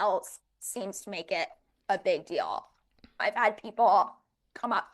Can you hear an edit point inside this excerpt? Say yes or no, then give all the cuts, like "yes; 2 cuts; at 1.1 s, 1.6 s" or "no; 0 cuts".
yes; 1 cut; at 3.2 s